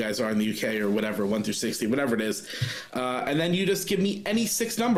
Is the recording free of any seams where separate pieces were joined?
yes; 0 cuts

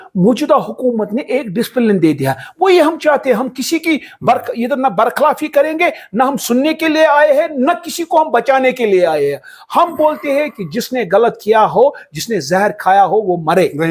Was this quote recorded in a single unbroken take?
yes; 0 cuts

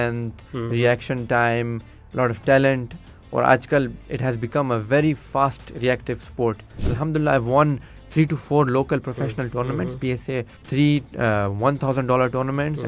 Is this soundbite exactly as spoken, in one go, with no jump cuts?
no; 3 cuts; at 4.0 s, 6.8 s, 10.6 s

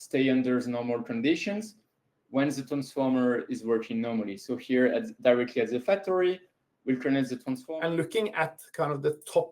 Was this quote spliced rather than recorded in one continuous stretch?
yes; 1 cut; at 7.6 s

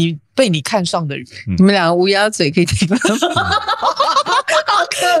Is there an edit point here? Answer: no; 0 cuts

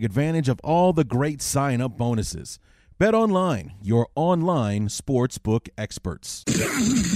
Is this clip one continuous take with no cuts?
no; 1 cut; at 6.2 s

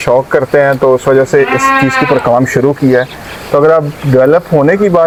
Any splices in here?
no; 0 cuts

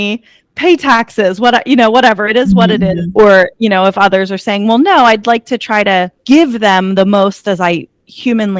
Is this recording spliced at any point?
yes; 2 cuts; at 3.1 s, 6.2 s

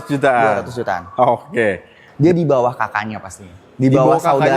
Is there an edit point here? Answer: yes; 1 cut; at 2.0 s

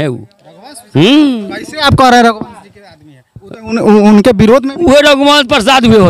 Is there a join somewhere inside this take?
no; 0 cuts

